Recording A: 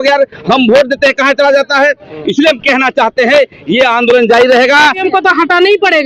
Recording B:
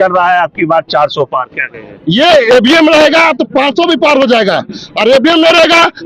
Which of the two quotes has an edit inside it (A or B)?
A